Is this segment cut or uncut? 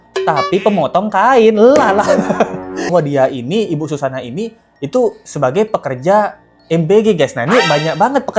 cut